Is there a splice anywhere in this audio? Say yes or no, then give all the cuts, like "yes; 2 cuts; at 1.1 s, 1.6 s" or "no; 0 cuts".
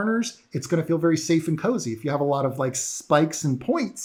no; 0 cuts